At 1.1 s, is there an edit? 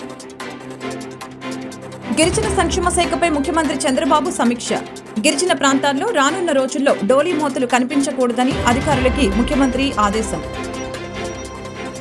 yes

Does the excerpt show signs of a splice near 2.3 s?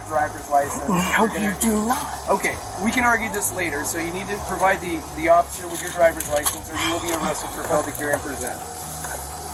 no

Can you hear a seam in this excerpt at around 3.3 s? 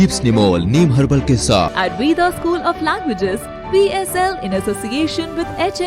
no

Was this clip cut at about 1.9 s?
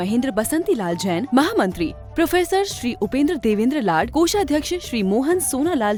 no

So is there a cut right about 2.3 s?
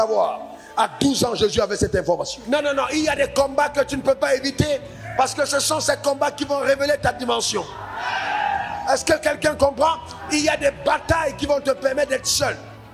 yes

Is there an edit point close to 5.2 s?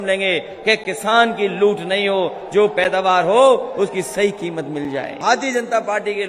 yes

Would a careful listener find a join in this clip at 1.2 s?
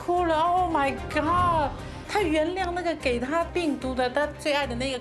no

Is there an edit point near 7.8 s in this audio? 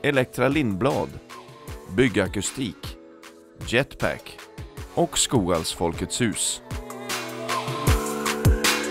no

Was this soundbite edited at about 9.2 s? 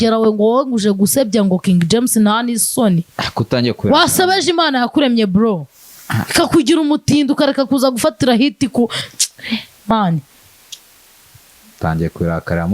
no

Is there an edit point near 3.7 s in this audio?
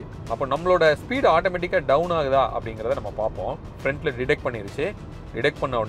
yes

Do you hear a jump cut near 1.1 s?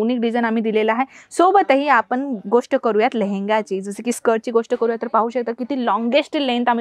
no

